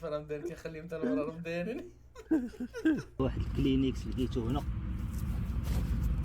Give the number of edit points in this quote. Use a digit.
1